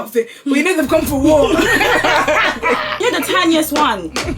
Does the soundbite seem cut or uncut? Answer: cut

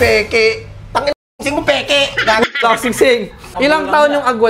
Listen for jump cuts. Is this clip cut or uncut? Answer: cut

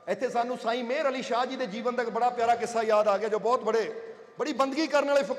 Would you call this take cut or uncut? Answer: uncut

